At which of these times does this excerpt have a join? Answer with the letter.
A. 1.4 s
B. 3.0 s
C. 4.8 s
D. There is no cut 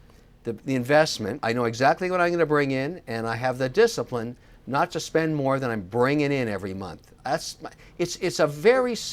A